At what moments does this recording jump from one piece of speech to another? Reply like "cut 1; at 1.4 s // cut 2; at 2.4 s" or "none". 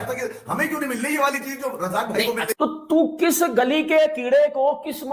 cut 1; at 2.5 s